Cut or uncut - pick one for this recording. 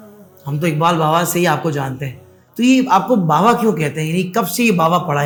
uncut